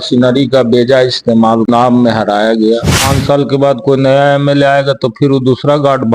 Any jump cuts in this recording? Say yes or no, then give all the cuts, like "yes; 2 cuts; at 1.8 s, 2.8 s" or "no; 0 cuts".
yes; 2 cuts; at 1.7 s, 3.1 s